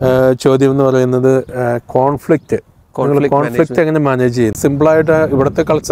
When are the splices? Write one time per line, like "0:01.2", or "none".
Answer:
0:04.6